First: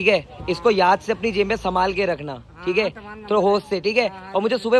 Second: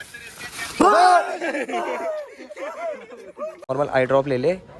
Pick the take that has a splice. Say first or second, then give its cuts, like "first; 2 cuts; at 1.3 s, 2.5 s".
second; 1 cut; at 3.7 s